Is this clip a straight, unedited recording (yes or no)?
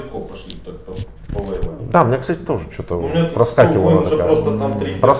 yes